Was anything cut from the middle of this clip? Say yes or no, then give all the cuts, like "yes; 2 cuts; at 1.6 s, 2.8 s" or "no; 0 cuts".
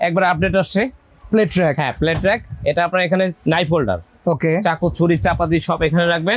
no; 0 cuts